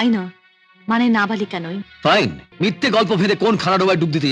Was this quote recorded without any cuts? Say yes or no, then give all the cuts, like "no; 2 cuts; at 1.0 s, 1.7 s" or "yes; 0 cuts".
no; 1 cut; at 2.4 s